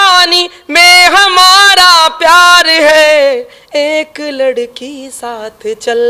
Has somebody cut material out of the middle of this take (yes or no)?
no